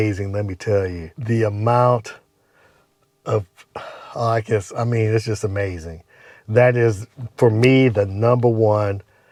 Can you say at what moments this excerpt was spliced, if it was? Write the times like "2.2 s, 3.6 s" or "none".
none